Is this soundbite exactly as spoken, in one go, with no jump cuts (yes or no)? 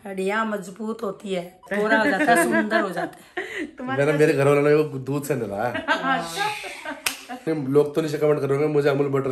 no